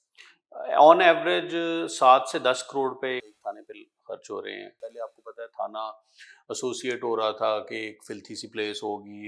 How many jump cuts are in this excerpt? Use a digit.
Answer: 2